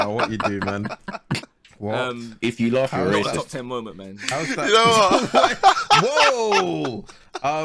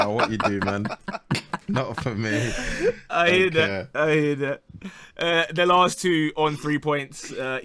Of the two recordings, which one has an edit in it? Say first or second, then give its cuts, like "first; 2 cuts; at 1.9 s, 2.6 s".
first; 1 cut; at 1.5 s